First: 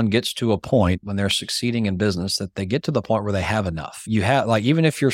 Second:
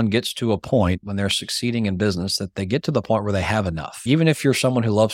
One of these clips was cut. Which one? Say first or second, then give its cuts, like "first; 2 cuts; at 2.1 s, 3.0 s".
second; 1 cut; at 4.0 s